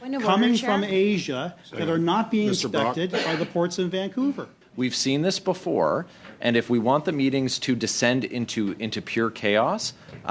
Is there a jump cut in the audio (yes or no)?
yes